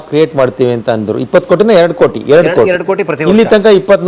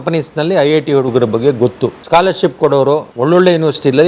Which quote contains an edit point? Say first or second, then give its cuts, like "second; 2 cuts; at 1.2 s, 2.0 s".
second; 2 cuts; at 2.0 s, 3.1 s